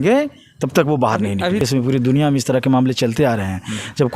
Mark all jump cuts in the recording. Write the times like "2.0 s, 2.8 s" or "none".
1.6 s